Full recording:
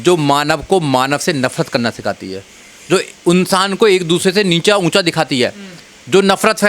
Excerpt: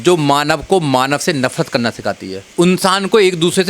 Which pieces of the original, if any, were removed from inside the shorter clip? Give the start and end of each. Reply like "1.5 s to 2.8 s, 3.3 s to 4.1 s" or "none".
2.5 s to 3.1 s